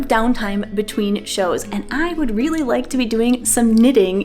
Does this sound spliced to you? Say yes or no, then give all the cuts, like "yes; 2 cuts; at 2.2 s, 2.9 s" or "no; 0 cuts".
no; 0 cuts